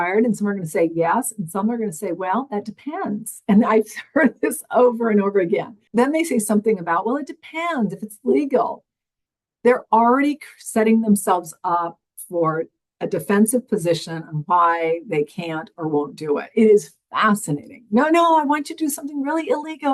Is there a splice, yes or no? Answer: yes